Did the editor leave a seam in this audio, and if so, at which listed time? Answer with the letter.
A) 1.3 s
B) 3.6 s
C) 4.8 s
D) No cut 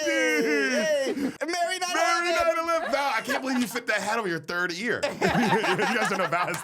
A